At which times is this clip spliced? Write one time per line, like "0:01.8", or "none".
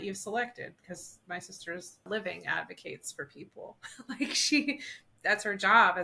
0:02.0